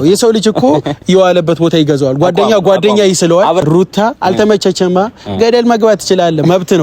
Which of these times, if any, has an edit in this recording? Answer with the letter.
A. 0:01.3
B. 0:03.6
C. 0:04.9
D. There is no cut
B